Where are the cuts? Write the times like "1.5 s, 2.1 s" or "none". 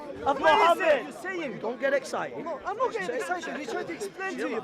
1.2 s